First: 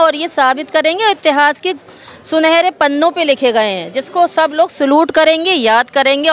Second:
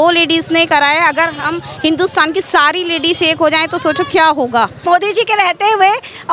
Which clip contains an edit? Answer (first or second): second